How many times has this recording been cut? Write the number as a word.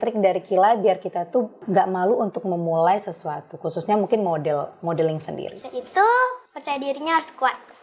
three